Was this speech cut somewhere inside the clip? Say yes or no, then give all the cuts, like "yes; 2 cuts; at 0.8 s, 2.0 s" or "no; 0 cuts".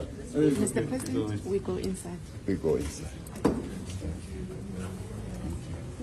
no; 0 cuts